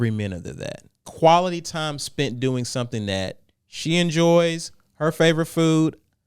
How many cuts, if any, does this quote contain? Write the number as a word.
one